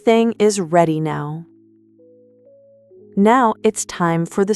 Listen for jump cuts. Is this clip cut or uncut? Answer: cut